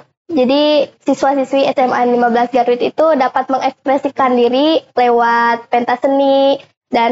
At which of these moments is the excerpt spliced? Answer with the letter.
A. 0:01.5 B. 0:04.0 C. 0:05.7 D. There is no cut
D